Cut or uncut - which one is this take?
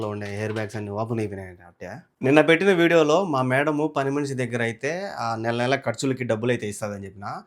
cut